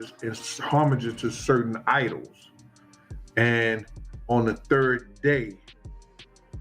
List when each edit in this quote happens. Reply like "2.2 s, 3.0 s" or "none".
5.7 s